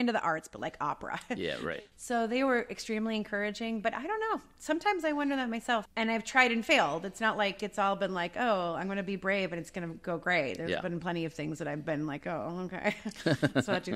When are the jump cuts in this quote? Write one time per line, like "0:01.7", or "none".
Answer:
0:01.7
0:05.9